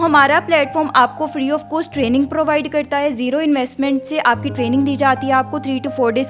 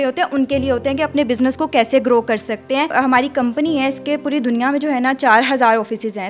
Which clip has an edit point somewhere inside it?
second; 1 cut; at 2.9 s

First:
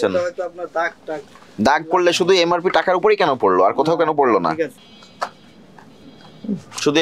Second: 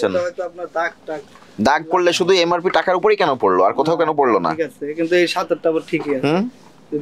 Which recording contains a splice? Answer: first; 1 cut; at 4.8 s

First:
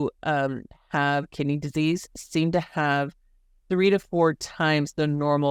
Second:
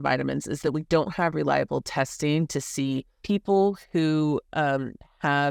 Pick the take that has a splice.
second; 1 cut; at 3.1 s

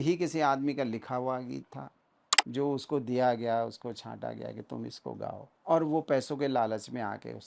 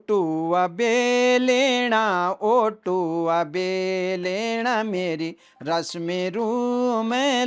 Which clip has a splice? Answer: first; 1 cut; at 5.5 s

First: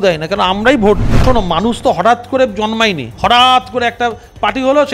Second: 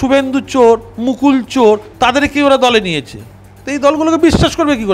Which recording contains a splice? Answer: first; 2 cuts; at 1.2 s, 3.1 s

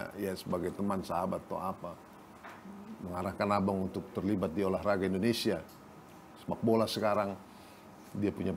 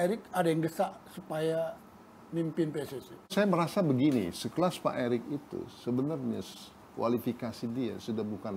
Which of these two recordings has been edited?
second; 1 cut; at 3.3 s

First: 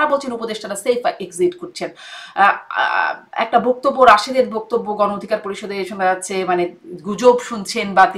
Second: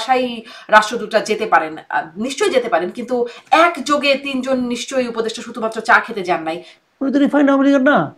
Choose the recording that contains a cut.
second; 1 cut; at 6.7 s

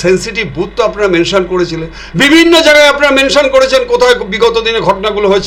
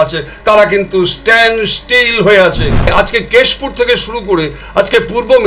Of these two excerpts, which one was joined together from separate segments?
second; 1 cut; at 2.9 s

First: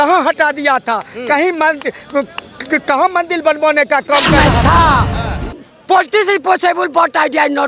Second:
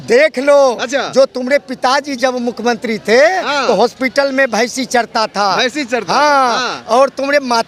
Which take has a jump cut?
first; 1 cut; at 4.3 s

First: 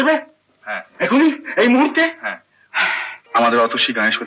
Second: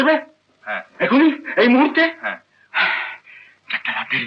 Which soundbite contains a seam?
first; 1 cut; at 3.1 s

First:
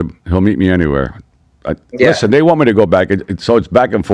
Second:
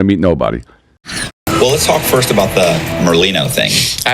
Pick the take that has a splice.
second; 1 cut; at 1.0 s

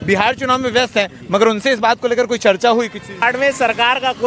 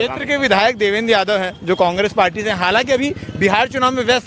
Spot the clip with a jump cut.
first; 1 cut; at 3.2 s

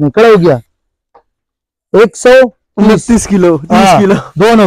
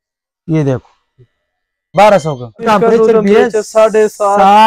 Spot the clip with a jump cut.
second; 2 cuts; at 1.9 s, 2.6 s

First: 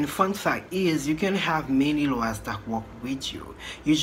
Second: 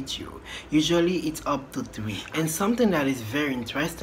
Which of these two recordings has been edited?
second; 1 cut; at 2.2 s

